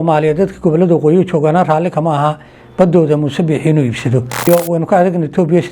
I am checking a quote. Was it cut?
yes; 1 cut; at 4.5 s

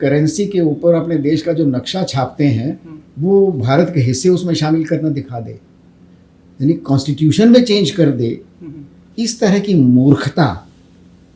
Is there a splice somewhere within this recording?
no; 0 cuts

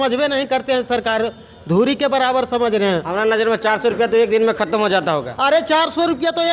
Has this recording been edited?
no; 0 cuts

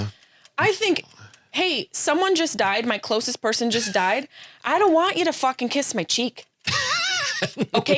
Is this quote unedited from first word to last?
yes; 0 cuts

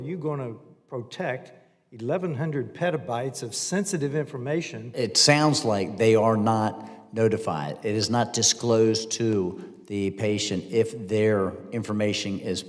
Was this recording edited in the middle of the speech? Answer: yes; 1 cut; at 4.8 s

